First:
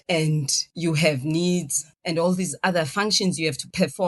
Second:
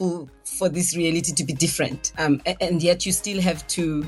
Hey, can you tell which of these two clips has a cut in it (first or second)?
first